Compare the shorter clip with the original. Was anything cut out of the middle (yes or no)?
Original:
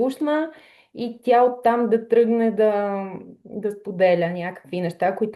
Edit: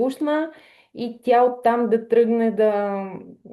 no